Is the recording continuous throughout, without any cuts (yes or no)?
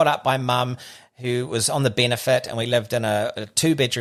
yes